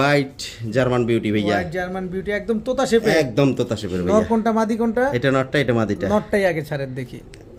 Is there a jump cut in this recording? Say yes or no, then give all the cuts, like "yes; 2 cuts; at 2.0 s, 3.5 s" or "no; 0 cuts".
no; 0 cuts